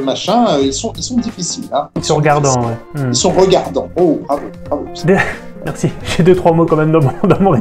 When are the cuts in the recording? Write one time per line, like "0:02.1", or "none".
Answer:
none